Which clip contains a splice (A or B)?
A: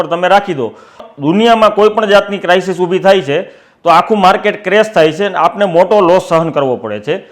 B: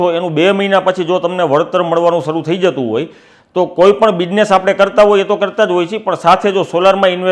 A